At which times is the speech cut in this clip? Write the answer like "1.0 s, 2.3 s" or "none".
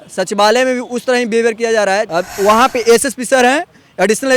2.1 s